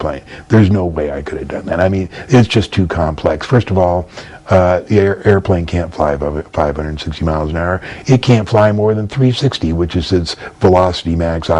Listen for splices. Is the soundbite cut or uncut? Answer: uncut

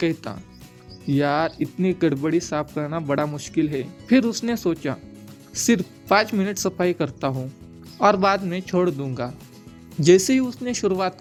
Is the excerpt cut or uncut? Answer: uncut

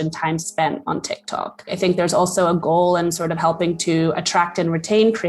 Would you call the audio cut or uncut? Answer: cut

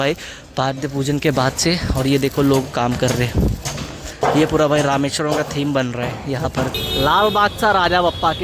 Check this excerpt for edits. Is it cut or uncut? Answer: cut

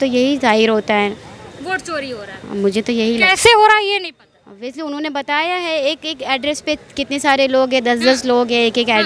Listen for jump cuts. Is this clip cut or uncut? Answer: uncut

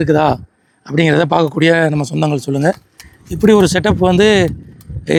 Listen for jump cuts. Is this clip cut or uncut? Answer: uncut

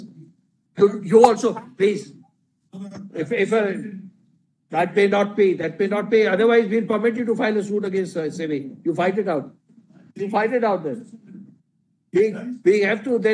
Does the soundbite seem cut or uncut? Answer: uncut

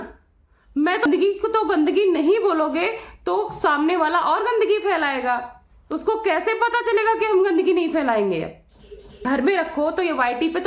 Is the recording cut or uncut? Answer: cut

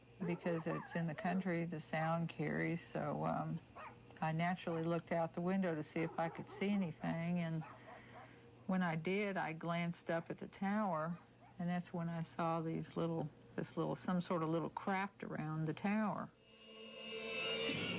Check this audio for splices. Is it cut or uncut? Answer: uncut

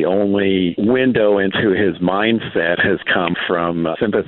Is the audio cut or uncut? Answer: cut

